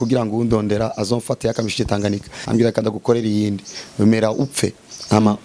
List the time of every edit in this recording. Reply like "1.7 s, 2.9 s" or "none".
2.3 s